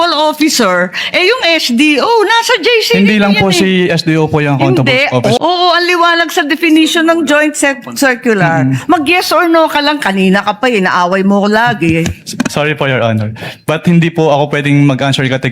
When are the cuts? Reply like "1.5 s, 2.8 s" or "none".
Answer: 5.4 s